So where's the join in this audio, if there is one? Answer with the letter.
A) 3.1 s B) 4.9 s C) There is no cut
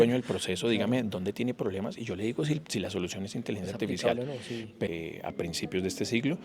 B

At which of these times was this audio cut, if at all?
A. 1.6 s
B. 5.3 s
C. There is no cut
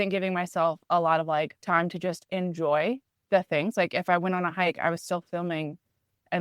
A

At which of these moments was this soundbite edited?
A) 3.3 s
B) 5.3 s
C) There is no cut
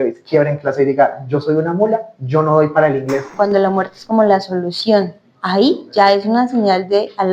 A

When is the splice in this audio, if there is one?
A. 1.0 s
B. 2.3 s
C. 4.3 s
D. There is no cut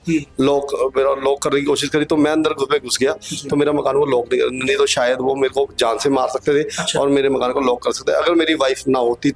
D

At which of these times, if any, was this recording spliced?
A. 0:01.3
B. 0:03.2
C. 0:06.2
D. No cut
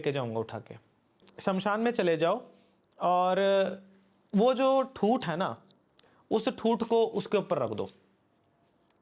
A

